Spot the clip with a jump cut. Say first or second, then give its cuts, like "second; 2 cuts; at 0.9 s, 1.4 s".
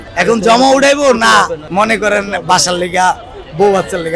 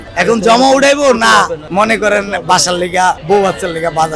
second; 1 cut; at 3.2 s